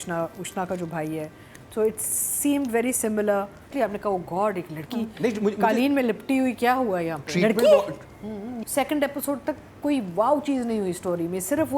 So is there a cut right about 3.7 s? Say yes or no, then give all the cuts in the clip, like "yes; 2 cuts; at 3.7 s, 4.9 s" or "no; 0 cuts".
yes; 2 cuts; at 3.7 s, 8.6 s